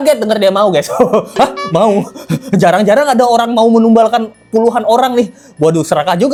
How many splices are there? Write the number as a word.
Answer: zero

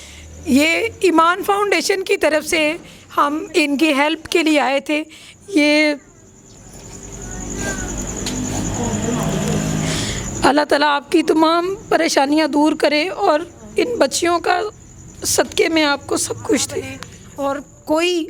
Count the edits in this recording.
zero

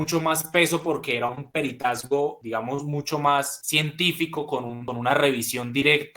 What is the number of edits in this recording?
three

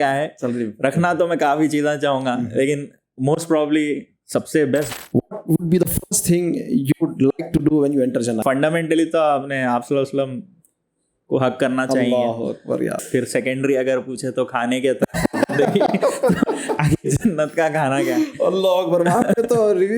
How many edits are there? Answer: three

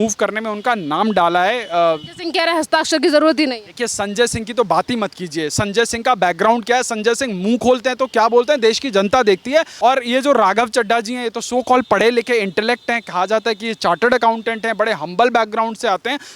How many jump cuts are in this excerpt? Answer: one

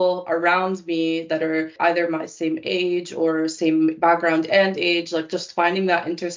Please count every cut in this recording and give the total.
one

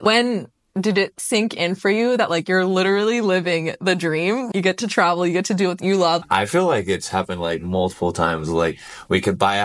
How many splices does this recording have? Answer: three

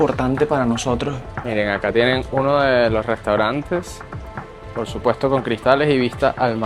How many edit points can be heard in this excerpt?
one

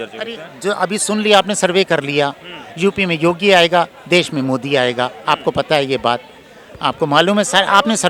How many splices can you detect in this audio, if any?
zero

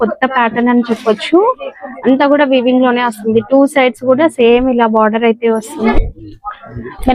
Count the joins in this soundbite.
one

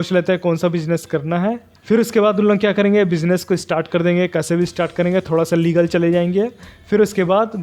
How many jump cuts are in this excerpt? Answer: one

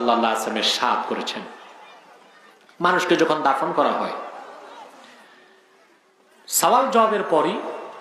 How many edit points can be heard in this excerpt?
zero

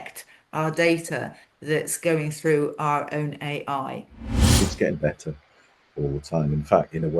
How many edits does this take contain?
one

